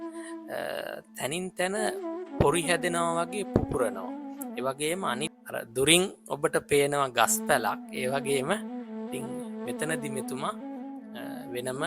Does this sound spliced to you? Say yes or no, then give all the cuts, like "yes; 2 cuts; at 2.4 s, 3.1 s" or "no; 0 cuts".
yes; 1 cut; at 5.3 s